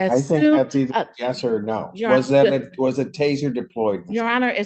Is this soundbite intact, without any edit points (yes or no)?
yes